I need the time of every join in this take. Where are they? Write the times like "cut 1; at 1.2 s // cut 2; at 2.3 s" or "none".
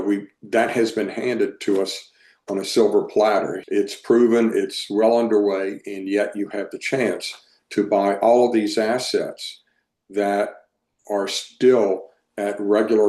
cut 1; at 3.6 s